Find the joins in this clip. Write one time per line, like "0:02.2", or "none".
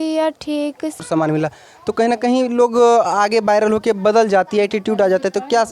0:01.0